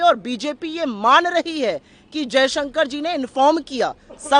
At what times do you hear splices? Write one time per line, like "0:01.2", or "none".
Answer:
none